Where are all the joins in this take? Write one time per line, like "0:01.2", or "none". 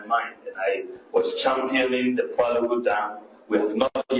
none

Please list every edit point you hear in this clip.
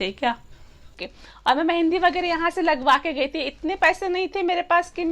0:00.9

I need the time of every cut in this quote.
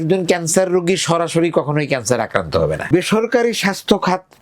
0:02.9

